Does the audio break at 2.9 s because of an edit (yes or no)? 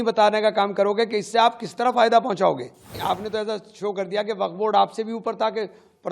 yes